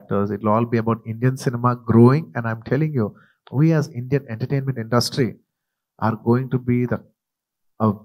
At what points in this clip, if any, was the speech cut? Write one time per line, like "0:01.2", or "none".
0:03.3

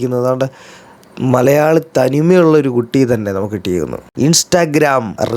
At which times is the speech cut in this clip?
0:04.0

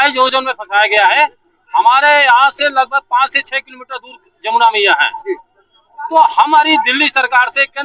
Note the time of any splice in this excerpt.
none

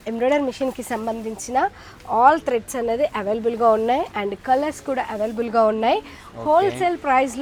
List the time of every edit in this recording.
none

